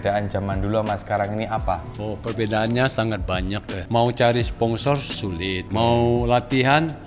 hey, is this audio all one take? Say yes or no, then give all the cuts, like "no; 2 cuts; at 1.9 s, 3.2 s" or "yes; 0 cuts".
no; 3 cuts; at 2.0 s, 3.7 s, 5.6 s